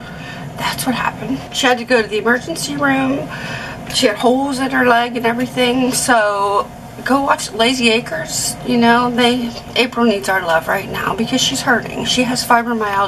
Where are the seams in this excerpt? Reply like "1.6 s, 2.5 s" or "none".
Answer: none